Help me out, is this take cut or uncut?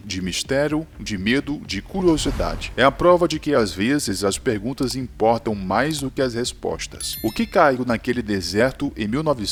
uncut